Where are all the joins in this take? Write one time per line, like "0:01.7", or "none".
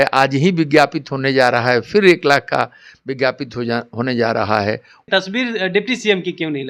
0:05.0